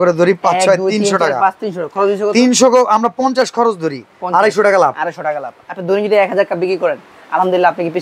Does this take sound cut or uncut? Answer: uncut